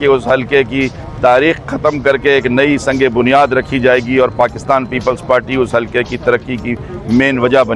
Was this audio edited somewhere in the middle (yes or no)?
no